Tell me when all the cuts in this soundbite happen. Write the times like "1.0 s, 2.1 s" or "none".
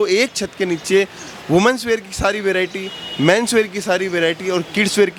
none

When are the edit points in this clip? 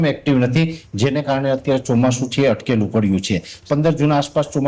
3.5 s

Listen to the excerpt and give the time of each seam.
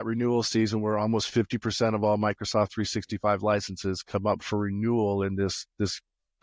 none

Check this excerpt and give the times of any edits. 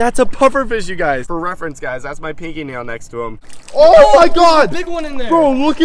1.2 s, 3.5 s

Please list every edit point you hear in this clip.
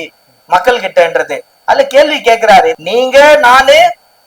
2.7 s

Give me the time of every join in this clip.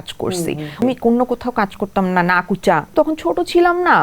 0.8 s, 2.9 s

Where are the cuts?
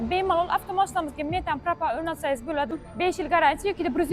2.8 s

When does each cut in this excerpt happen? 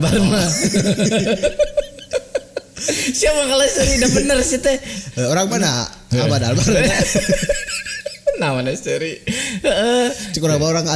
none

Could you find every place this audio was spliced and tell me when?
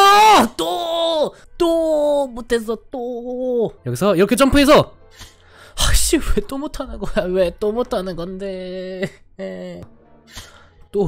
3.8 s, 9.9 s

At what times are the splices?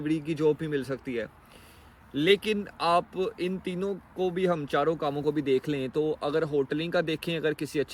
none

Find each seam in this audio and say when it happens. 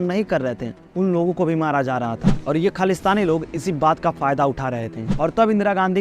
2.3 s, 5.0 s

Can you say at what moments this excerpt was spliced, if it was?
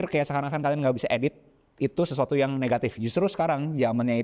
none

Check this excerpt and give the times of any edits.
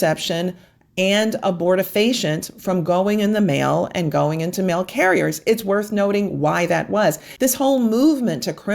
7.3 s

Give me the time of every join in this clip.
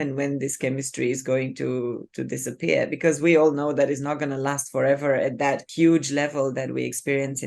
5.7 s

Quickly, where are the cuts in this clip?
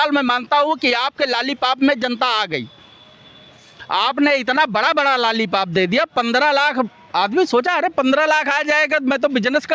none

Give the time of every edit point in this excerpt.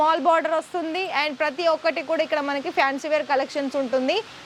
none

